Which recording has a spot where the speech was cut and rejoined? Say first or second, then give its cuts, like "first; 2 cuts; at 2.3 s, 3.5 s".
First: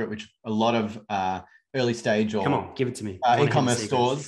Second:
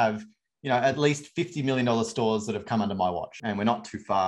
second; 1 cut; at 3.4 s